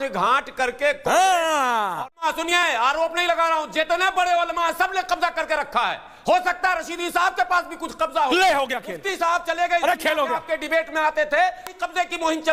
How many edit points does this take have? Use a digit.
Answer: 1